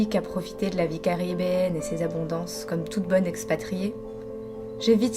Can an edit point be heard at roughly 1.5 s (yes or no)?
no